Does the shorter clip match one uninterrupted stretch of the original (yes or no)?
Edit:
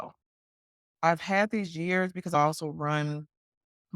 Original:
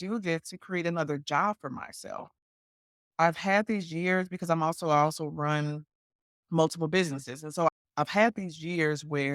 no